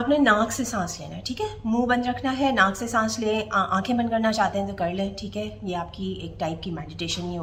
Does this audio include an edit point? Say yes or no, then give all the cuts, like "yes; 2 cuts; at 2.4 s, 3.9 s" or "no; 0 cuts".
no; 0 cuts